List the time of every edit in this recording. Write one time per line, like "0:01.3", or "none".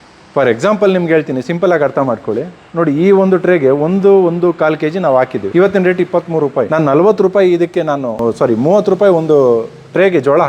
0:05.4
0:06.7
0:08.1